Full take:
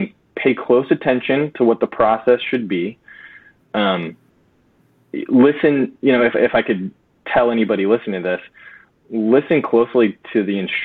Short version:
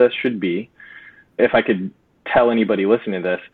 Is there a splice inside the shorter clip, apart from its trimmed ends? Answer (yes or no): yes